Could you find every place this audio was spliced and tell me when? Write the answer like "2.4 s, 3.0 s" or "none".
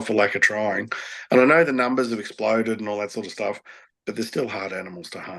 none

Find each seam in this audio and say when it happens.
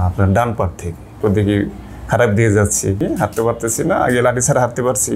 1.1 s, 3.0 s

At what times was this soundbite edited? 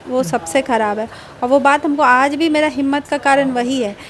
none

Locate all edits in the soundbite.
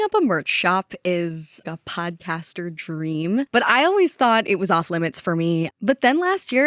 1.6 s, 5.7 s

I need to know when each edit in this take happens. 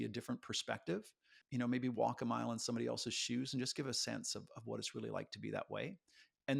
1.4 s

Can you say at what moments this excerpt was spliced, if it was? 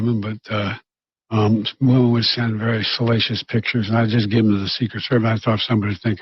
4.1 s

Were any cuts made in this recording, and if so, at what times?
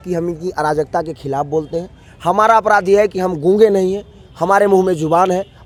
none

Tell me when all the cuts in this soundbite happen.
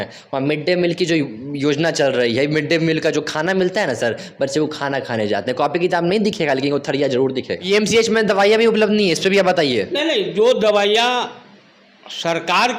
7.6 s

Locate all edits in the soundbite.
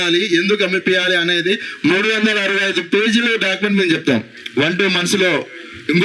4.4 s

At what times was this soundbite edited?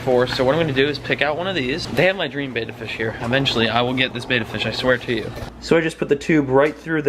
1.8 s, 5.4 s

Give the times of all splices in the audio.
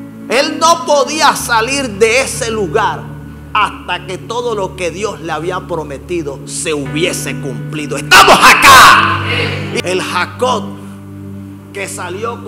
9.8 s

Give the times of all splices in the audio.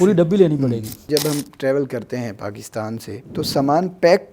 1.1 s, 3.2 s

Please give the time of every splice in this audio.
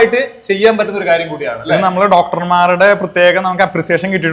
none

